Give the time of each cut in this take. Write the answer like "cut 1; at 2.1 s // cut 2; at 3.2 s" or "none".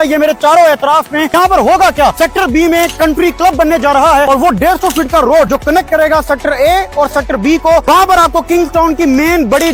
none

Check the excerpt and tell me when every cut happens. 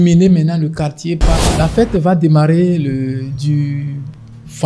cut 1; at 1.4 s

